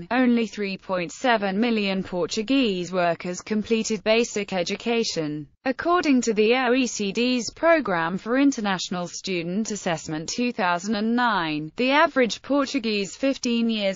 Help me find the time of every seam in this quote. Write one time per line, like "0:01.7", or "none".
0:12.0